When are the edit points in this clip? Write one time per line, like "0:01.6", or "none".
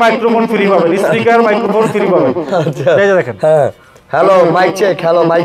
none

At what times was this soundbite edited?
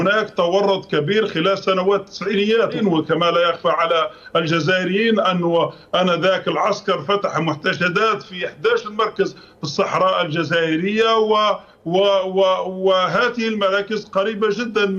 0:02.8

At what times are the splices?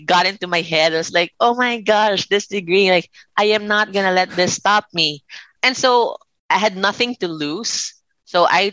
0:05.4
0:06.3

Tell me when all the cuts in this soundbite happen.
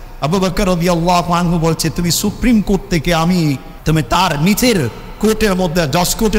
0:03.7

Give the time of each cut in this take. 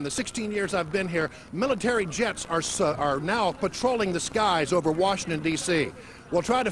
0:05.4

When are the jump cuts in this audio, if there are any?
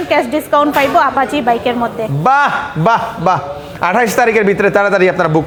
none

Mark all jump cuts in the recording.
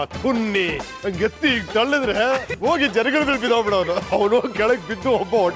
none

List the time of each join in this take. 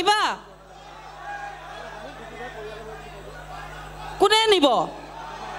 none

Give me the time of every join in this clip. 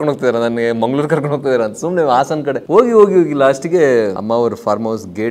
0:02.6
0:04.2

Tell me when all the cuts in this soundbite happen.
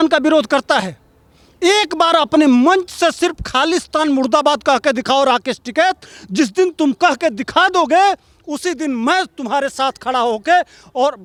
none

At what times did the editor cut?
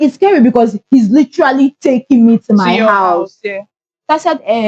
none

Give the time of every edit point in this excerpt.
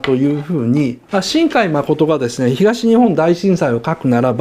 0:01.0

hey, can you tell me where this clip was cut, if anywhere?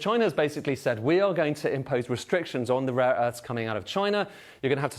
none

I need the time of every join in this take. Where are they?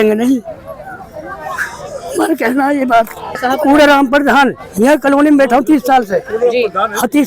none

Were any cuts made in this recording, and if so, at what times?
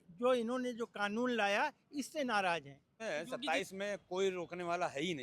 0:03.0

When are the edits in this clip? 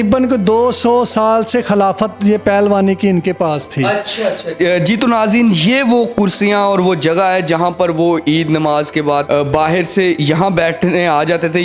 0:04.5
0:09.2

